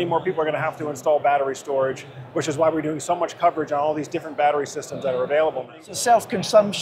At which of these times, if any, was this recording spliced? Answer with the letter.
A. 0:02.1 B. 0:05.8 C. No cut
B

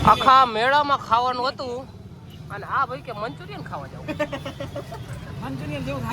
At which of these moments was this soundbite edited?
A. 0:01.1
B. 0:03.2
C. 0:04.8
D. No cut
D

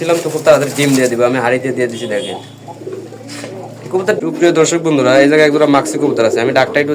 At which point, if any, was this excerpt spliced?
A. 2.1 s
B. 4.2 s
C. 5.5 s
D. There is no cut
B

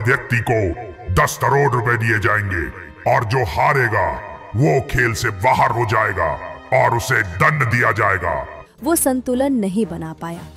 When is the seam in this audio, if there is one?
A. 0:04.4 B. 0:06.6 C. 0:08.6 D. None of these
C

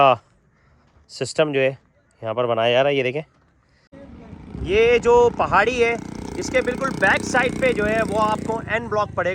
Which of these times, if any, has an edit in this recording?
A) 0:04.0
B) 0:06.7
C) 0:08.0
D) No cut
A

